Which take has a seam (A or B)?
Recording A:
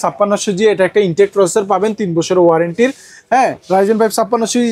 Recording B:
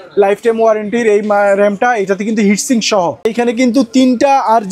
B